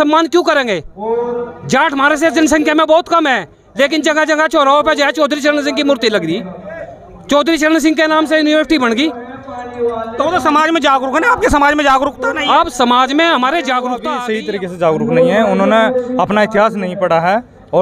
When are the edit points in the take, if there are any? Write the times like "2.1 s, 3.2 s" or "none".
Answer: 14.1 s